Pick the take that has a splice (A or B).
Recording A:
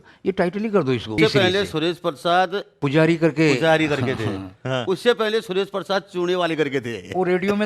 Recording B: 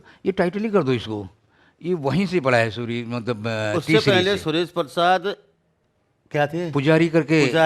A